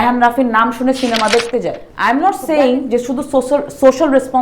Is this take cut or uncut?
cut